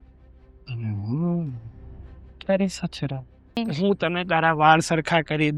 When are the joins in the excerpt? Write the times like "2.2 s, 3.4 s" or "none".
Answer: 3.6 s